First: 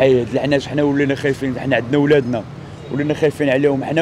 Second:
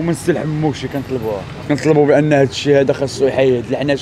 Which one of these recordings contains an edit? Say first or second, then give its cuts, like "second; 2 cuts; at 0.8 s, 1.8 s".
second; 1 cut; at 1.5 s